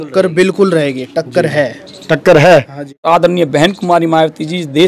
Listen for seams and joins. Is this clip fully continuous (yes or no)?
no